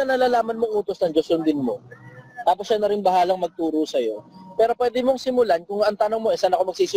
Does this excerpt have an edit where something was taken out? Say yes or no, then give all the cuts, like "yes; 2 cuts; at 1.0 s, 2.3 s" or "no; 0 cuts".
no; 0 cuts